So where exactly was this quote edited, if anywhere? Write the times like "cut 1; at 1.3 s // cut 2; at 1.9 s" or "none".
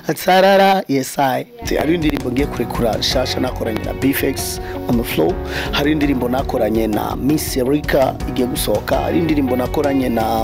cut 1; at 1.6 s